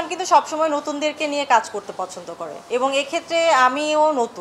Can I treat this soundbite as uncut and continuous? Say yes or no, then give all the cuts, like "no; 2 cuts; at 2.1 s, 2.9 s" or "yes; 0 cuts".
yes; 0 cuts